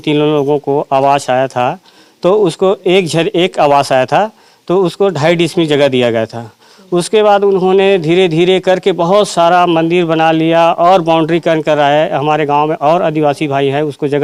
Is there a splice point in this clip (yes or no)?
no